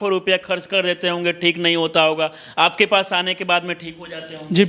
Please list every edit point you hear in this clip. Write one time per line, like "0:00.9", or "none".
none

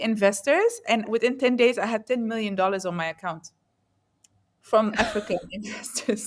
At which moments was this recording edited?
none

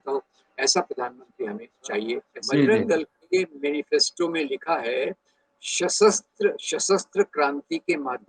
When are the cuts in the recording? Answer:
0:02.3

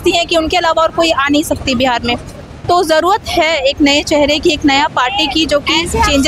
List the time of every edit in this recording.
none

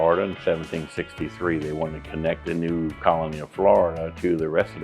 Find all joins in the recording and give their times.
0:02.6

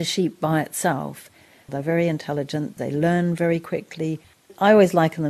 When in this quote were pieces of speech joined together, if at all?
0:01.7
0:02.8
0:04.5

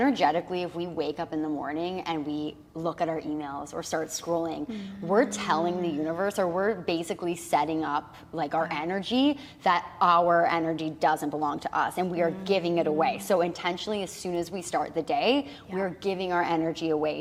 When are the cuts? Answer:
none

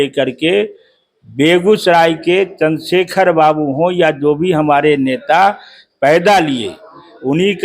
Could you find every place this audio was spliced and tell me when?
none

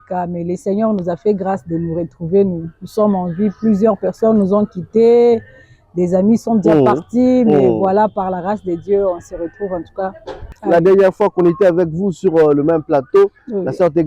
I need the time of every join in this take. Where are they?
0:10.5

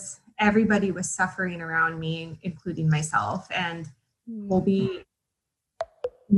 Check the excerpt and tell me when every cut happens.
none

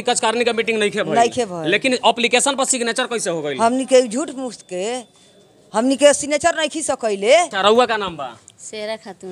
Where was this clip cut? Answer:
0:07.5

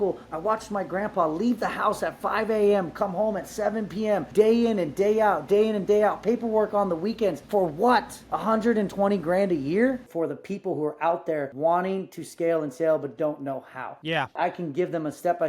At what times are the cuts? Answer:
0:04.3
0:07.4
0:08.2
0:10.1
0:11.5
0:14.4

